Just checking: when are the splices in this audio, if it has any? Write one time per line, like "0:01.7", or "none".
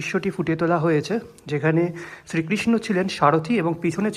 none